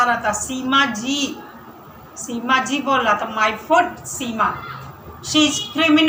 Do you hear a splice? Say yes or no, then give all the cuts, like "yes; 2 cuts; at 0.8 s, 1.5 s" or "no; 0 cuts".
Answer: no; 0 cuts